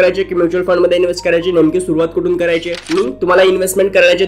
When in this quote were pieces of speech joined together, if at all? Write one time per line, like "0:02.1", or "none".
0:02.9